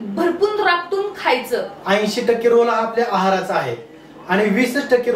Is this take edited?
yes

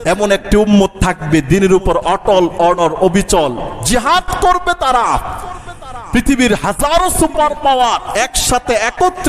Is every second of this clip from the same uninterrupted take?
yes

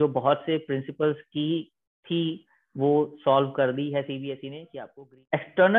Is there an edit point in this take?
yes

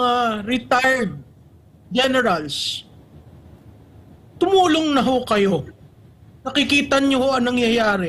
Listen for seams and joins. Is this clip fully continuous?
yes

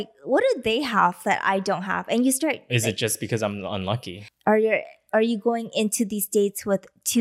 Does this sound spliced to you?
yes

